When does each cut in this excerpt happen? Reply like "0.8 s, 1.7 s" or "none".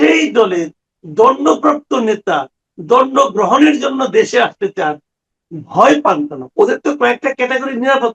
6.4 s